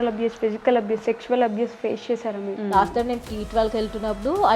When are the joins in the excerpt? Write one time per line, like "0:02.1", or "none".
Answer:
0:02.5